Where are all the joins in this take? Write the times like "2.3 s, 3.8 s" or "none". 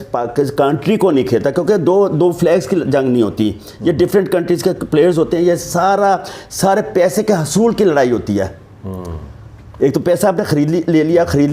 none